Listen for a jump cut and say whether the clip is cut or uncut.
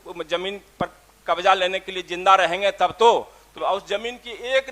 cut